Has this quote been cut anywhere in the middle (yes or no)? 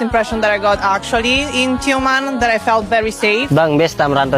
yes